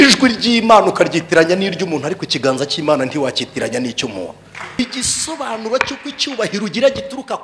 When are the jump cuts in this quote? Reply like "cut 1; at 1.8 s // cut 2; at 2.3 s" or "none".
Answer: cut 1; at 4.8 s